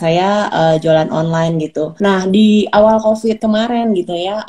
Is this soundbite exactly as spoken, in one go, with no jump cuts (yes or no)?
no